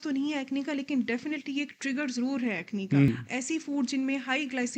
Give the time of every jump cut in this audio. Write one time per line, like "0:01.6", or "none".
0:03.1